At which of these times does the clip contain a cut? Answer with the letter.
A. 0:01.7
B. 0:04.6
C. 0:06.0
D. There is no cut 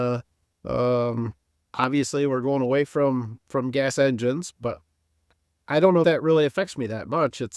C